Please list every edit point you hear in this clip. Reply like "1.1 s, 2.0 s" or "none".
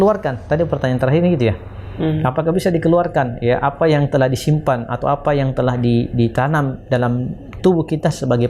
none